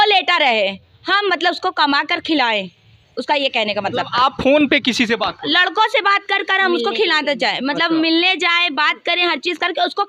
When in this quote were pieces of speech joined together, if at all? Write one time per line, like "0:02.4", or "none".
none